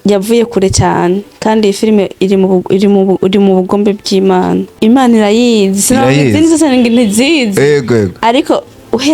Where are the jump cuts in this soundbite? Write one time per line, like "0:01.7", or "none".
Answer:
0:04.7